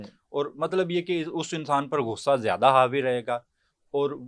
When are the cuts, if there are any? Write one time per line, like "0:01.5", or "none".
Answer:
none